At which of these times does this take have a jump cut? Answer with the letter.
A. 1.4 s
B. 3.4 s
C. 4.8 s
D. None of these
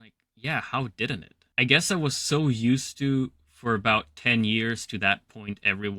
A